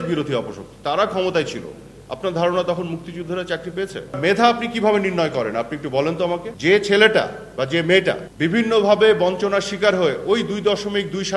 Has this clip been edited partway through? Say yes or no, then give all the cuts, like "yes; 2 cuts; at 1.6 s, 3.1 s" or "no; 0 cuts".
yes; 2 cuts; at 4.1 s, 6.5 s